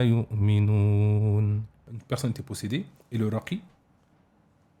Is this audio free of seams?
no; 1 cut; at 1.9 s

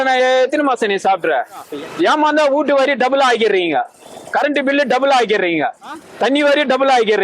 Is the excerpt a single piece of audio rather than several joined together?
no; 2 cuts; at 1.7 s, 6.1 s

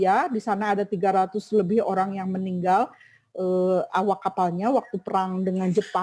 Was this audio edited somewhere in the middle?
no; 0 cuts

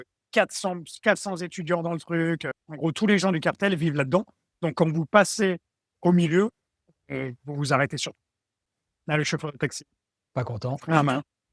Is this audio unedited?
no; 2 cuts; at 2.6 s, 8.5 s

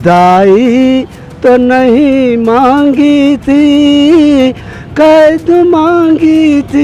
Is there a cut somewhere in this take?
no; 0 cuts

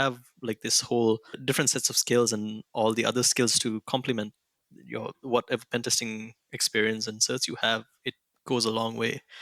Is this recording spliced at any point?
yes; 1 cut; at 1.4 s

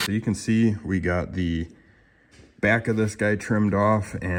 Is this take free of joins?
yes; 0 cuts

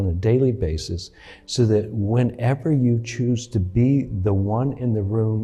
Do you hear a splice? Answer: no; 0 cuts

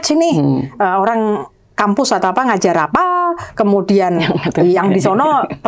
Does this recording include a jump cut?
no; 0 cuts

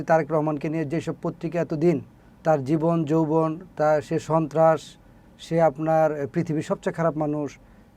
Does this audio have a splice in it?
no; 0 cuts

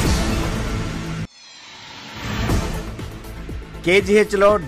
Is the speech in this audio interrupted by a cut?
yes; 2 cuts; at 1.0 s, 3.4 s

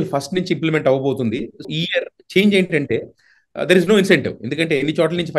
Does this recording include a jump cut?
yes; 1 cut; at 1.7 s

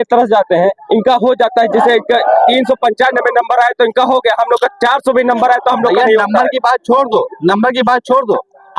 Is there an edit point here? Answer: no; 0 cuts

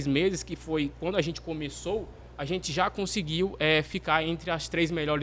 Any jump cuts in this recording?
no; 0 cuts

